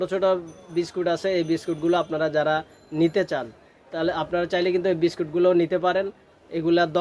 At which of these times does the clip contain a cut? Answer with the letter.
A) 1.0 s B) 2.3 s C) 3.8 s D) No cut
D